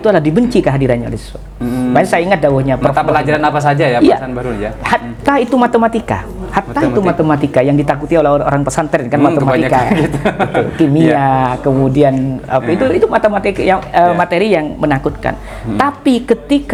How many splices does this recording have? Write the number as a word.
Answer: zero